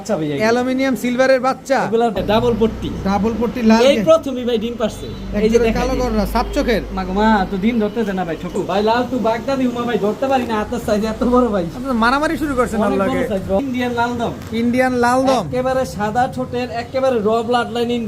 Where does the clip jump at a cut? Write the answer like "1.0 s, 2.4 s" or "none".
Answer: 2.2 s, 8.5 s, 13.6 s